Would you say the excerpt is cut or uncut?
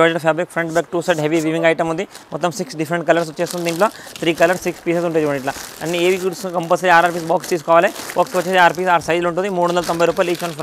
uncut